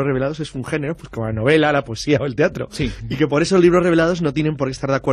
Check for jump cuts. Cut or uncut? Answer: uncut